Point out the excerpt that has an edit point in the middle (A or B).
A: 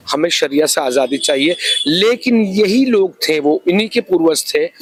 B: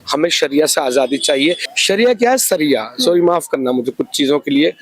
B